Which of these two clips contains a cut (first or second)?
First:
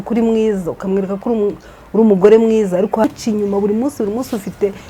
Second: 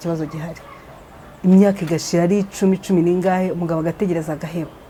first